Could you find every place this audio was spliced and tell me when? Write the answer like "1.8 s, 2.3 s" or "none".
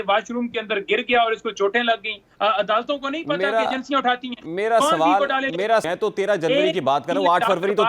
2.2 s, 5.9 s